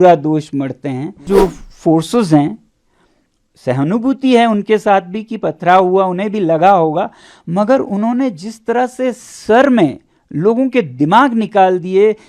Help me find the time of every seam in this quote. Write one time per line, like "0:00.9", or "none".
0:01.2